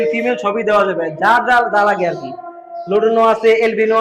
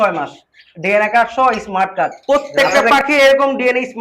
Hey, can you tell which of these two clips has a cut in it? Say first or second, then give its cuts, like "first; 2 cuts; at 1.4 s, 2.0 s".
second; 1 cut; at 2.5 s